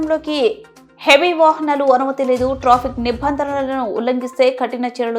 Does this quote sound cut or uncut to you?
uncut